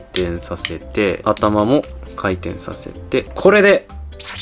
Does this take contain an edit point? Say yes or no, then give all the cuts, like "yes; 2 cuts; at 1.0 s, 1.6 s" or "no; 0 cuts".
yes; 2 cuts; at 1.2 s, 3.3 s